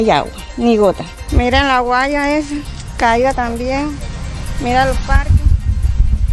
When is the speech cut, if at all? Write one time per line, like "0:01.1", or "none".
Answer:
0:01.1